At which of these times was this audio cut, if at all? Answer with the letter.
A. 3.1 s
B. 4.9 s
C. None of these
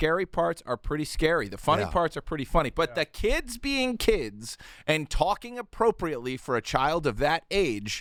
C